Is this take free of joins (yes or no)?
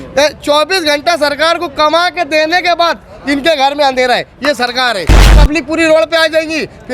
no